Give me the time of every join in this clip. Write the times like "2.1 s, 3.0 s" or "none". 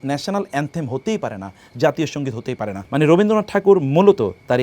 2.8 s